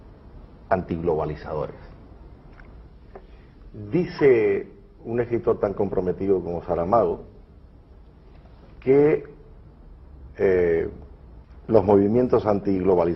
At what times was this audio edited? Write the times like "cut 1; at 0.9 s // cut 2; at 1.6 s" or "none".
cut 1; at 5.1 s